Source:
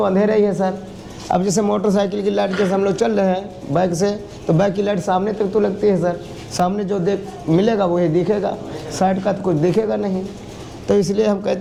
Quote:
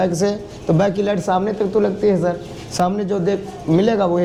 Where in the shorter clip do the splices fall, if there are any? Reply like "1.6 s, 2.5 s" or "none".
none